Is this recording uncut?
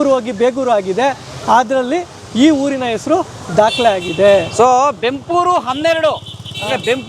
yes; 0 cuts

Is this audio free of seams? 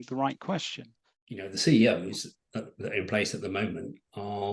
no; 1 cut; at 1.2 s

